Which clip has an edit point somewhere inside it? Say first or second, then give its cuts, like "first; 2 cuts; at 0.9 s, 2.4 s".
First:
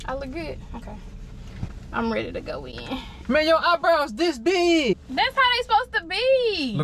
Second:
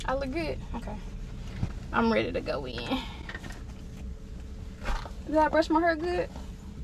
first; 2 cuts; at 3.1 s, 5.0 s